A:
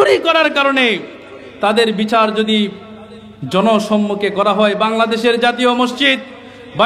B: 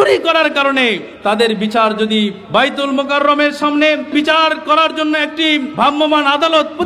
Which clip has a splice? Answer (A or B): B